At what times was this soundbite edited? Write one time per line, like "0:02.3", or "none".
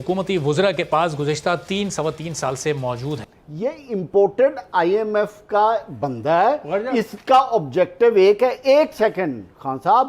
0:03.2